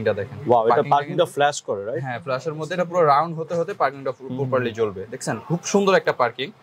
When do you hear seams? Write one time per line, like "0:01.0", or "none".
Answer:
none